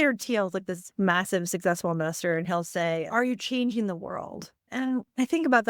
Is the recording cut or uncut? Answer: cut